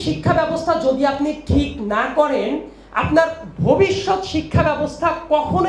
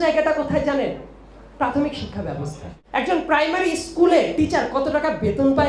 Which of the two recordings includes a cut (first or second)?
second